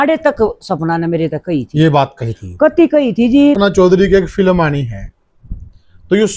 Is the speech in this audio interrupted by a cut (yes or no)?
yes